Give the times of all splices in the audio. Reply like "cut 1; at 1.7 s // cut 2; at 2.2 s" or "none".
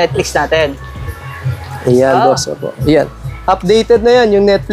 none